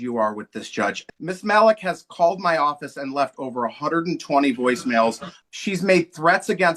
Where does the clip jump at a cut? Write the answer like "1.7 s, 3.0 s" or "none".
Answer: 1.0 s, 5.3 s